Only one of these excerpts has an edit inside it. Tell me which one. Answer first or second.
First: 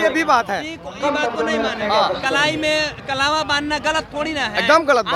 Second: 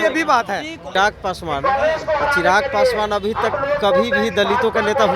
second